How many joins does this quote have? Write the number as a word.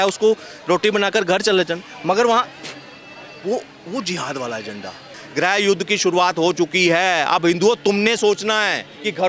one